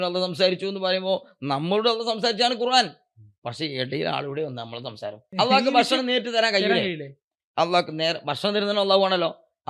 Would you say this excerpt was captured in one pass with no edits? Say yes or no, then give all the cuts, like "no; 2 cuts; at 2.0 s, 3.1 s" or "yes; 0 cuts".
no; 1 cut; at 5.3 s